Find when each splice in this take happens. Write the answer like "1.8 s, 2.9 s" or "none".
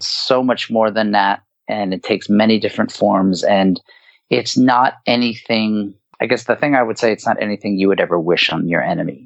none